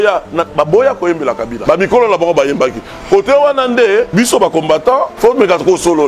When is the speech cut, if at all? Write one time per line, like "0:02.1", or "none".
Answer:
0:01.6
0:04.1
0:05.1